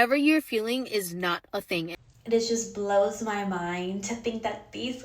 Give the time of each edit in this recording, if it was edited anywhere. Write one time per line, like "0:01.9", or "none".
0:02.0